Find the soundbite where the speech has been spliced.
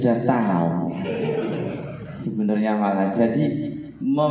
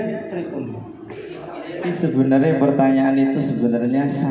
second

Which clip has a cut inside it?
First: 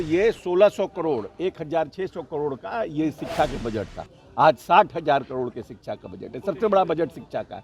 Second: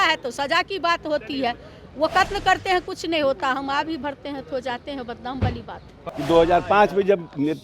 second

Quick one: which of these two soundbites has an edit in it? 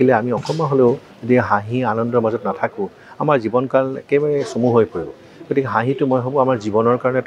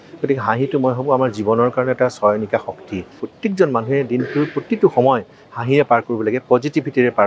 second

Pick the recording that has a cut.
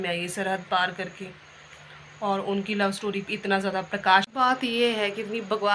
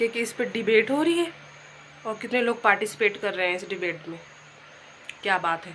first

